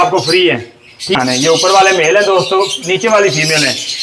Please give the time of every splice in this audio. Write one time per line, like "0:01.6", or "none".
0:01.2